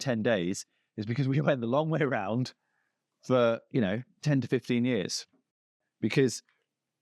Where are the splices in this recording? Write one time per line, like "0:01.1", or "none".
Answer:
0:05.7

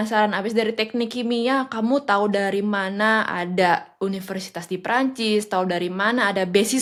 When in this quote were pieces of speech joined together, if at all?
none

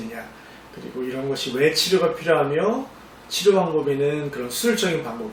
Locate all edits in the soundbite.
none

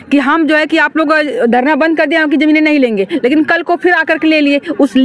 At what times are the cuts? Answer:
none

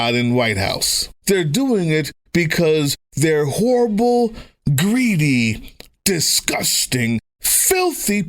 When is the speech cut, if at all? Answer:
0:01.1

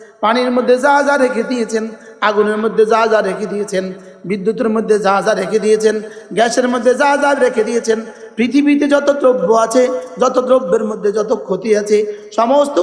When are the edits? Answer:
none

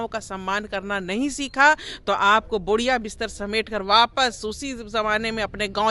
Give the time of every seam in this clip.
none

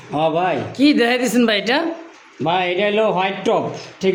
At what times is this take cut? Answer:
none

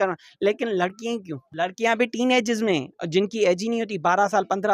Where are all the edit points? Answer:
0:01.5

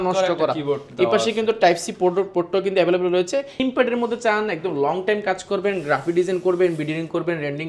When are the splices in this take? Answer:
0:03.5

